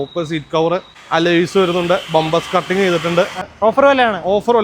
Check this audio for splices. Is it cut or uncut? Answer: cut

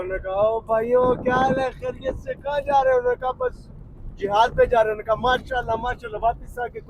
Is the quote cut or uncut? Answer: uncut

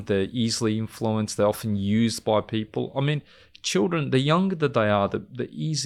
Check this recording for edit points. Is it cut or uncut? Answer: uncut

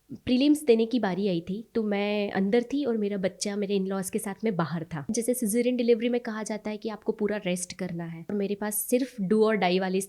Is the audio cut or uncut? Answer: cut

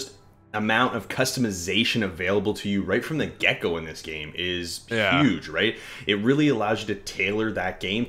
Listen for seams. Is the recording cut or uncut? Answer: uncut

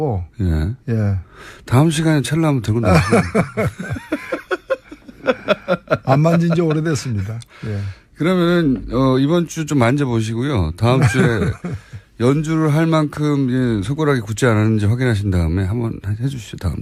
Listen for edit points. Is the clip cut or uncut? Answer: cut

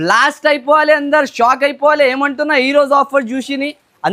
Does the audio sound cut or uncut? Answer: uncut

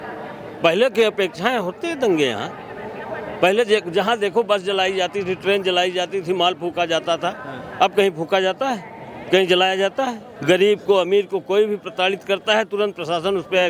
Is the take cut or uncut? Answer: cut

